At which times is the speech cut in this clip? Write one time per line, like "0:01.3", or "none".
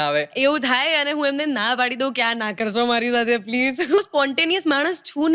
0:04.0